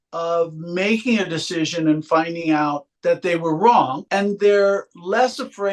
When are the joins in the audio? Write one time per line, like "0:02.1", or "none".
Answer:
0:02.9
0:04.0